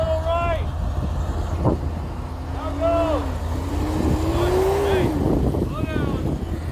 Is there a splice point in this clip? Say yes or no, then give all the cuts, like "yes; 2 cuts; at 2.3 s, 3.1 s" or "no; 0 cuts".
no; 0 cuts